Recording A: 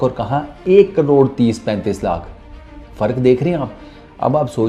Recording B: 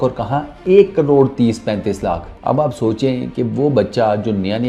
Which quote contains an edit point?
B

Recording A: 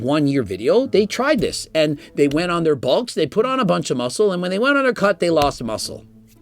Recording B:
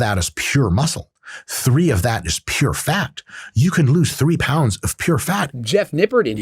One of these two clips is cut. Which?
B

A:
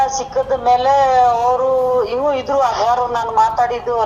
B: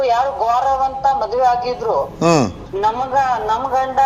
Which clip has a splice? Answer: B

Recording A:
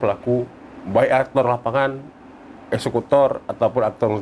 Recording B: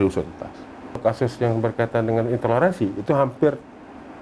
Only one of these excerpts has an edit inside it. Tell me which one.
B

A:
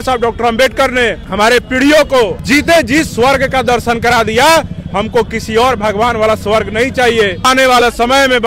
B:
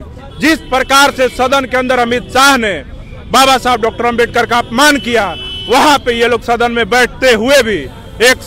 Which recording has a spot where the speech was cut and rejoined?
A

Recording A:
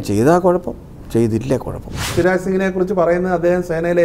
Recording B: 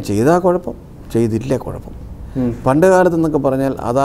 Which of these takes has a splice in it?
A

